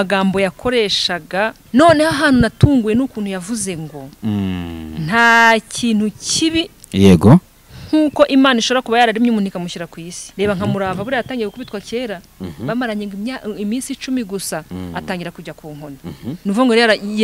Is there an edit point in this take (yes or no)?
yes